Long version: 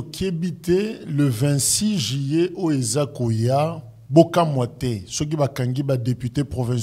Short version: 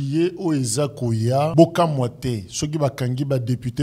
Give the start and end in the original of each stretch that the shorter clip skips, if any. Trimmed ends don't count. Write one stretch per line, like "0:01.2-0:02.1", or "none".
0:03.7-0:04.1